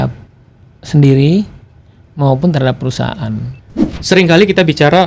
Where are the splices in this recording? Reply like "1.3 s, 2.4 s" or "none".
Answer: 3.9 s